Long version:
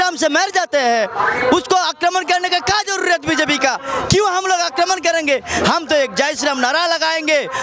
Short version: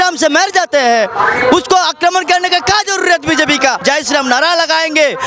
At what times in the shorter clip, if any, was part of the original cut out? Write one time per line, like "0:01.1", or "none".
0:03.8